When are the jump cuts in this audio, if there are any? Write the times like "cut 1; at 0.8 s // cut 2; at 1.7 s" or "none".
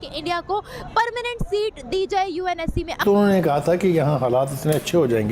cut 1; at 3.0 s